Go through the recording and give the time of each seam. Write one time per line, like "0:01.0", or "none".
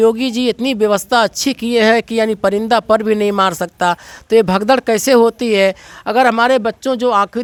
none